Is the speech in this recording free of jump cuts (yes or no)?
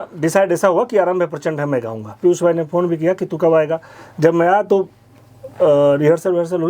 no